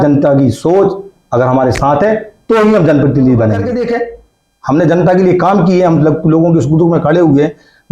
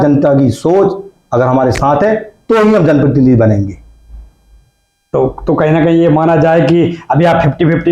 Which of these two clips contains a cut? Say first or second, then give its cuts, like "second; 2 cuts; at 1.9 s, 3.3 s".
first; 1 cut; at 3.7 s